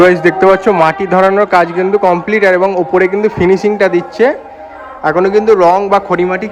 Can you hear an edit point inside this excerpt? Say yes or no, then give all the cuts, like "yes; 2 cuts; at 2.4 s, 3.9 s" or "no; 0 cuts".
no; 0 cuts